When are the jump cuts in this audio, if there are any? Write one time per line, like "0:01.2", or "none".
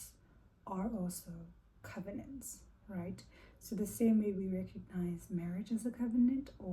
none